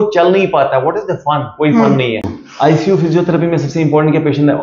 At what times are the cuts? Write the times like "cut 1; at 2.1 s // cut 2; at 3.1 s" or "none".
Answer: none